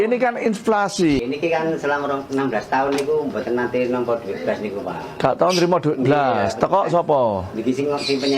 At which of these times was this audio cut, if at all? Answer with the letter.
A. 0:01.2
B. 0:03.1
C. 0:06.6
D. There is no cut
A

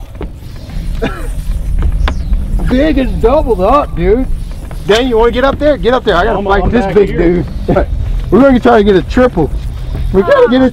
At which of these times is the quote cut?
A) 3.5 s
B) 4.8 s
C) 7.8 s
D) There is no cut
C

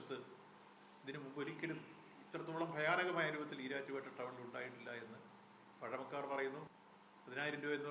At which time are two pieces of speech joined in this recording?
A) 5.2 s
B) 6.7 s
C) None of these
B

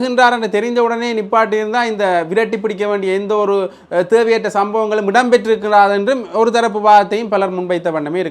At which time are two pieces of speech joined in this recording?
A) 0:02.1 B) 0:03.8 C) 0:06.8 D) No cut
D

